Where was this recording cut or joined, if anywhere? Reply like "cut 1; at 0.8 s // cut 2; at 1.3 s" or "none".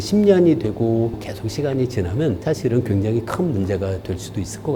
cut 1; at 1.2 s